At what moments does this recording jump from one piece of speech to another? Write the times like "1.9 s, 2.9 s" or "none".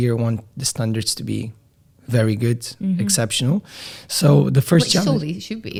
none